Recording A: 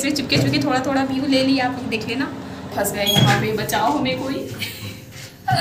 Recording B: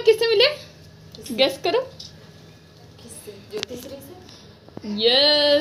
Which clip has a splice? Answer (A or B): A